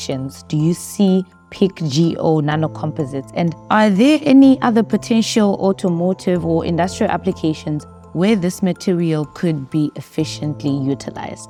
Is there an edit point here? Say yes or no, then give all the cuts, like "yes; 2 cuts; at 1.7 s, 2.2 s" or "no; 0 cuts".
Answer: no; 0 cuts